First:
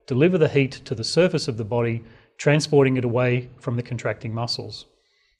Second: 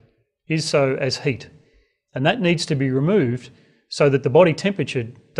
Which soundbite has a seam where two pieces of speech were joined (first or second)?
first